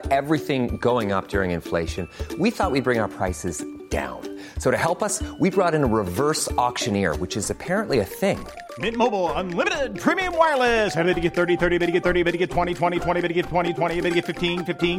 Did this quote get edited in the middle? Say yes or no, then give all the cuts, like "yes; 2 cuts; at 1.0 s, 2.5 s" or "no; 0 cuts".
no; 0 cuts